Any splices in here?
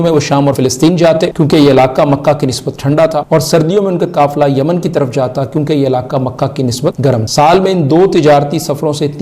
yes; 3 cuts; at 0.9 s, 3.2 s, 7.1 s

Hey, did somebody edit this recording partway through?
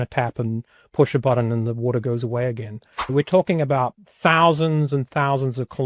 yes; 2 cuts; at 3.1 s, 4.0 s

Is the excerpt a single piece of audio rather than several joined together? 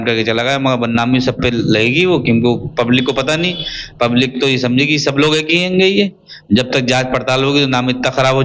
yes; 0 cuts

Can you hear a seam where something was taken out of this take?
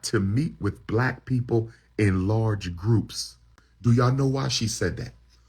yes; 1 cut; at 3.6 s

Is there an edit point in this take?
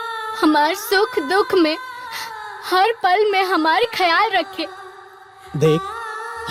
no; 0 cuts

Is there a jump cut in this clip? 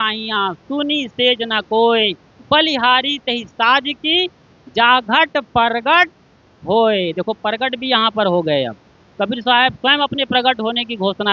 no; 0 cuts

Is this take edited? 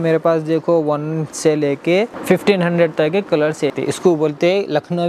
yes; 2 cuts; at 2.2 s, 3.7 s

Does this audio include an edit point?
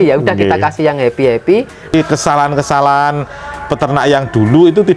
yes; 1 cut; at 1.9 s

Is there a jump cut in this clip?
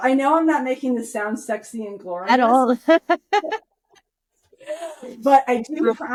no; 0 cuts

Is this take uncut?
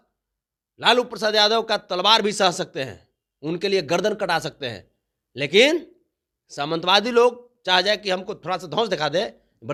yes; 0 cuts

